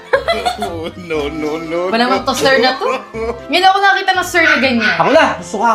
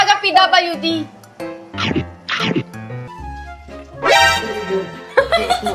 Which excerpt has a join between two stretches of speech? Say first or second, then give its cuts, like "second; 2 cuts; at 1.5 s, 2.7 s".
second; 1 cut; at 3.0 s